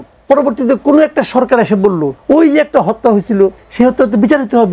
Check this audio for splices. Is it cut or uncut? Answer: cut